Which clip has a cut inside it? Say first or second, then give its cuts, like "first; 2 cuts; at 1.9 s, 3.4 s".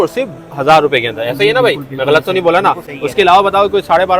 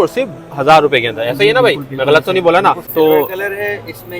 second; 1 cut; at 2.8 s